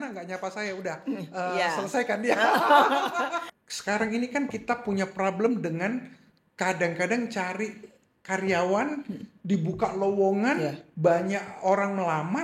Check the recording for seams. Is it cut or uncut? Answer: cut